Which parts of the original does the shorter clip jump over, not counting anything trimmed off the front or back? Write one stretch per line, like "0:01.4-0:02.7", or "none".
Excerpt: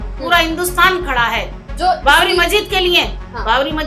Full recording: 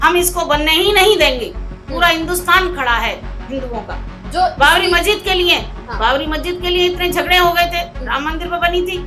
0:03.3-0:04.1